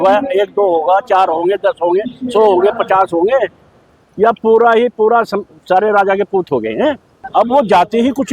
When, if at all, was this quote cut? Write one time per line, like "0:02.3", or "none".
0:07.1